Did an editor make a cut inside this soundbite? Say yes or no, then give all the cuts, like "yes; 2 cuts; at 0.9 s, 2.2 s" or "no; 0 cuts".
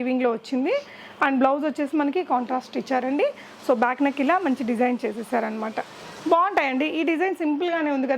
no; 0 cuts